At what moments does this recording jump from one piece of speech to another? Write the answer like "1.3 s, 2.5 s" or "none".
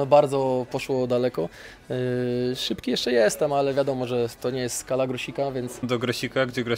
5.9 s

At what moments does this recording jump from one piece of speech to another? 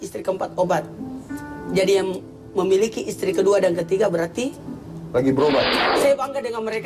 5.8 s

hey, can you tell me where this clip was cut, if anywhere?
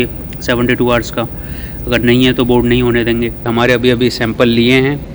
3.5 s

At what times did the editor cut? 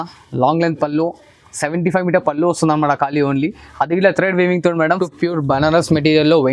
4.9 s

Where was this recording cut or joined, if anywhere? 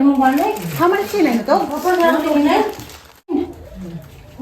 3.3 s

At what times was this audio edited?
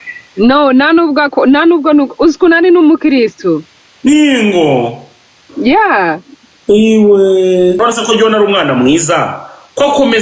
7.8 s

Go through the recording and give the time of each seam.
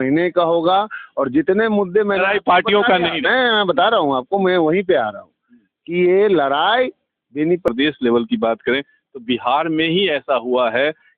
7.7 s

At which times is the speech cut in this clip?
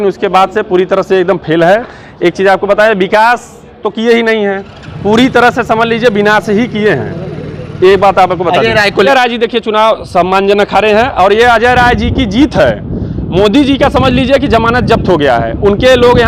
9.1 s

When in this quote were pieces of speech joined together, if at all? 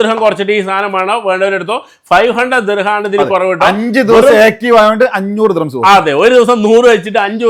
none

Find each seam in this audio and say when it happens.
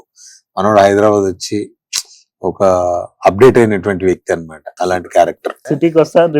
4.6 s, 5.5 s

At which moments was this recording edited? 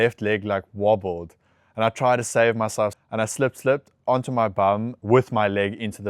2.9 s, 4.9 s

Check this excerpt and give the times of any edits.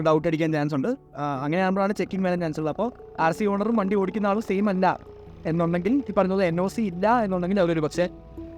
none

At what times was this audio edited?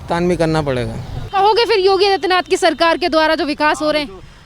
1.2 s

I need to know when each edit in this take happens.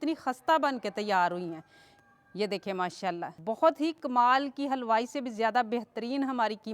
3.3 s

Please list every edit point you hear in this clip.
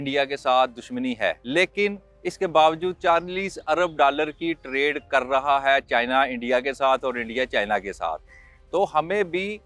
1.4 s

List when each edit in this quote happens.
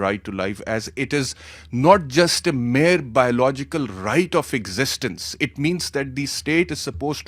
none

